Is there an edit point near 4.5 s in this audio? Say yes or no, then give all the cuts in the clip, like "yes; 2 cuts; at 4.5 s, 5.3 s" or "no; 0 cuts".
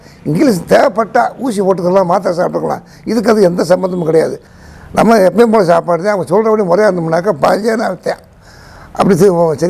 yes; 1 cut; at 4.5 s